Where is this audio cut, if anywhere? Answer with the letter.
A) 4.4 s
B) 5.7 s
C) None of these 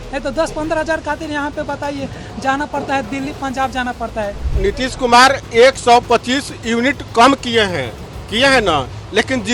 A